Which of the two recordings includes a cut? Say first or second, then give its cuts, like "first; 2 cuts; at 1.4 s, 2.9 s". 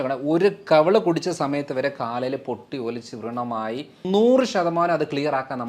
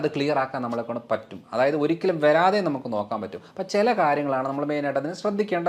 first; 1 cut; at 4.0 s